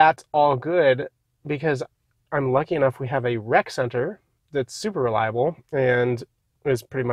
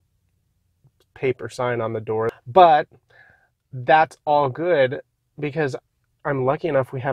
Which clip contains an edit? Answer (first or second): second